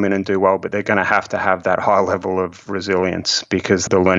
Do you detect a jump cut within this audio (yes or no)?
no